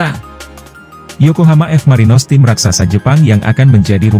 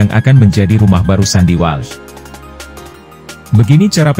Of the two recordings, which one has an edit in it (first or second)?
second